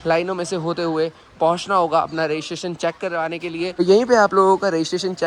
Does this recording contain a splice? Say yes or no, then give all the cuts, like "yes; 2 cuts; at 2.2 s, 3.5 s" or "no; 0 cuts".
no; 0 cuts